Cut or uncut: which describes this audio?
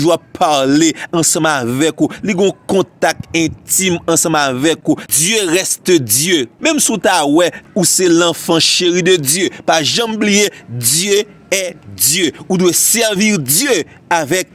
cut